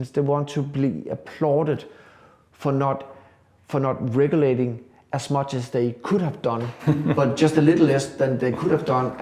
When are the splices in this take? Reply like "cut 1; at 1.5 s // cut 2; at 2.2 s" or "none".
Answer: none